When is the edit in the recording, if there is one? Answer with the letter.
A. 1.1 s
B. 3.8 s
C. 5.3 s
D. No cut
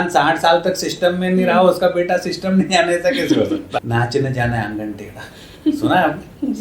B